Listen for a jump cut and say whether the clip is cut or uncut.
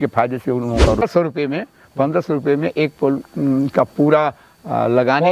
cut